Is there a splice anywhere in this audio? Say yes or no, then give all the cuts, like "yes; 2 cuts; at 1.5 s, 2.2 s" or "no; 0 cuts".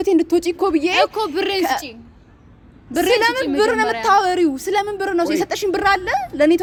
no; 0 cuts